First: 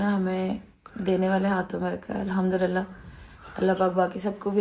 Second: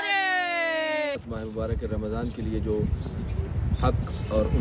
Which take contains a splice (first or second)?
second